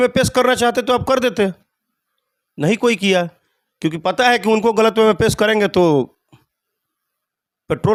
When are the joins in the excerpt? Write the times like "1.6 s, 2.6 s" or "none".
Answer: none